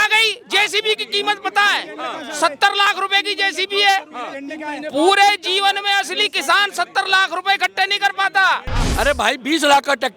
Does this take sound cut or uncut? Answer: cut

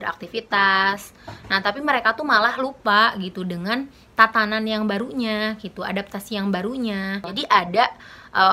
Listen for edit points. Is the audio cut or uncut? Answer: uncut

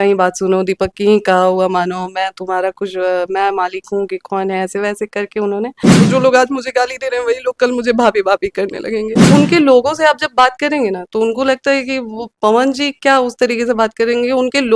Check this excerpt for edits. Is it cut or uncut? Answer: cut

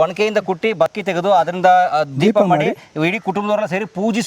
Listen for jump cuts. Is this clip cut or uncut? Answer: cut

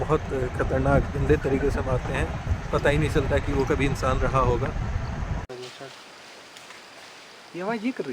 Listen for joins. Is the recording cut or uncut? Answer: cut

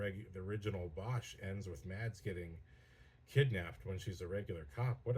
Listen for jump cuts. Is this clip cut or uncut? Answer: uncut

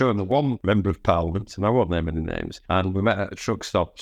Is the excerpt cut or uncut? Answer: cut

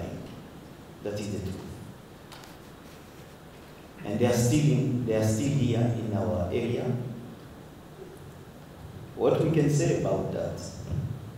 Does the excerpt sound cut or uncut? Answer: uncut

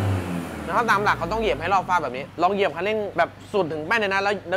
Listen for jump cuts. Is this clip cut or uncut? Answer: cut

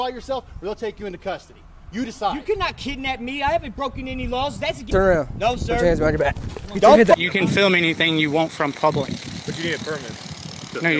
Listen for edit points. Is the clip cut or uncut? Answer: cut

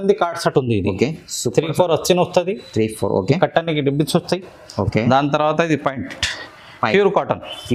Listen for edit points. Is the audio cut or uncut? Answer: uncut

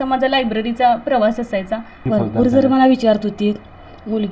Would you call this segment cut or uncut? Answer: cut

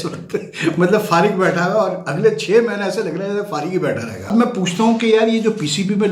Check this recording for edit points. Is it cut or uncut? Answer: cut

